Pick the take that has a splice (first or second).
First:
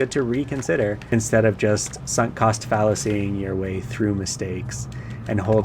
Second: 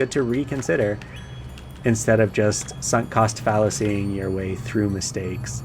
first